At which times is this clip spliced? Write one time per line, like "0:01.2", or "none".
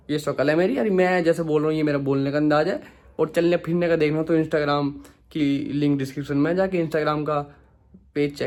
none

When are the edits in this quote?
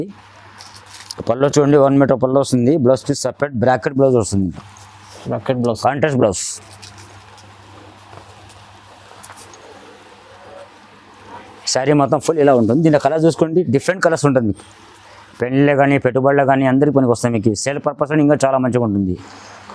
none

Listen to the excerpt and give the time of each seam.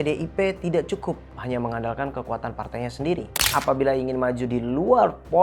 0:03.5

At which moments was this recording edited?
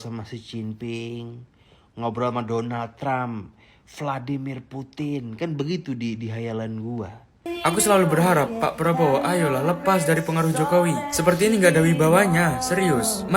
0:07.4

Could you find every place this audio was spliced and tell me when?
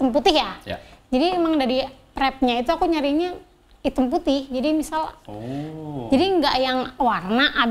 none

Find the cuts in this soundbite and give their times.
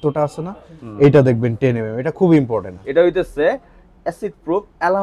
0:02.8

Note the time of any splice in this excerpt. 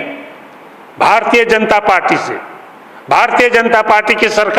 none

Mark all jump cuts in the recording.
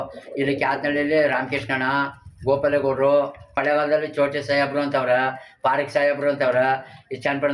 0:03.6

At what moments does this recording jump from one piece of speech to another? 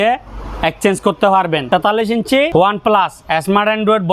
0:02.0

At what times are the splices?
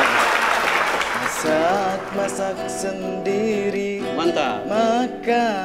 0:01.3

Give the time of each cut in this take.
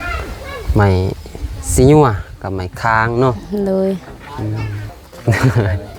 0:04.9

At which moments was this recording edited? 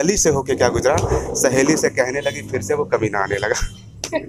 none

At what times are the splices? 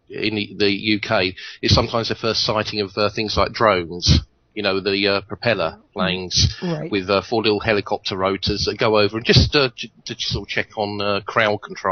none

